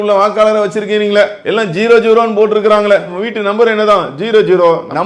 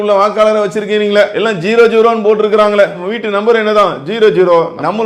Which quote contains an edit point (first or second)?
second